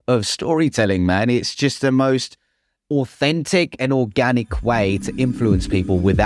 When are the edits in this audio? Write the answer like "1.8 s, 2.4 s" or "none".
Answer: none